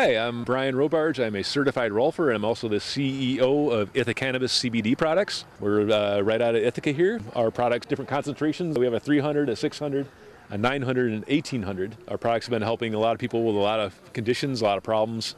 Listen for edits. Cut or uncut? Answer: uncut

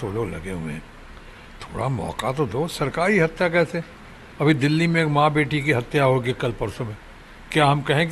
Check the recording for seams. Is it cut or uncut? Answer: uncut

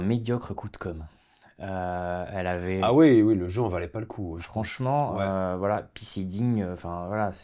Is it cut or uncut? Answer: uncut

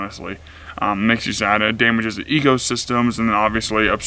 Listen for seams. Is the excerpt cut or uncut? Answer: uncut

